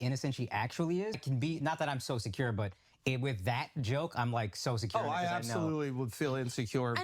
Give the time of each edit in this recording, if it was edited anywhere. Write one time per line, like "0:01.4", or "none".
0:01.1